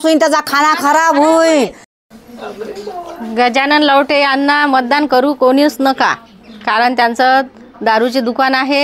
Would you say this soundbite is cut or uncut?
cut